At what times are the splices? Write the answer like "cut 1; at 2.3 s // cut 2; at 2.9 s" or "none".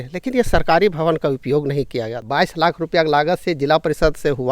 cut 1; at 2.2 s

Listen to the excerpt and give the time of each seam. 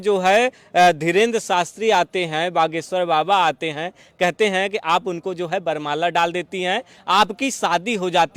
none

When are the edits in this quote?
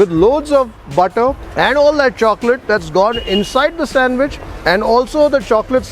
cut 1; at 1.4 s

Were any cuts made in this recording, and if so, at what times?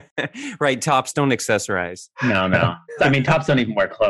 cut 1; at 3.0 s

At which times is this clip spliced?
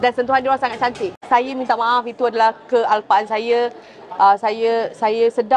cut 1; at 1.2 s

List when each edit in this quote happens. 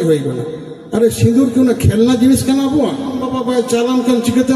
cut 1; at 3.3 s

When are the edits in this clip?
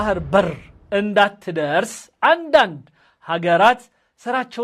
none

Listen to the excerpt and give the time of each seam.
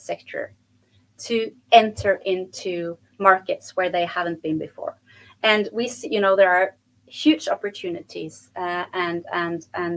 none

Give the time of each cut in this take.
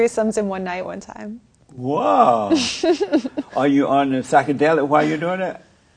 cut 1; at 3.4 s

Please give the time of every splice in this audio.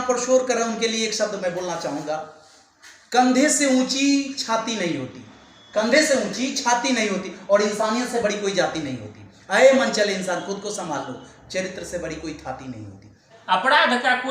cut 1; at 13.3 s

